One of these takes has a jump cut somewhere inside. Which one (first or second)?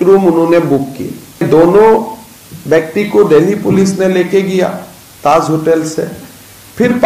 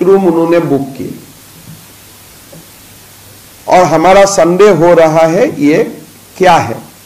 first